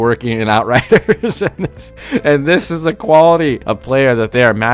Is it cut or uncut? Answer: cut